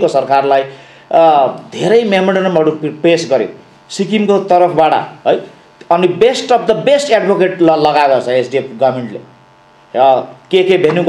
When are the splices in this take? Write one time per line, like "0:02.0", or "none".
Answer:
none